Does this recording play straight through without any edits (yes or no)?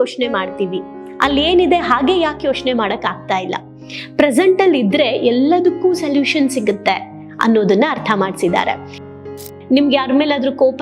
no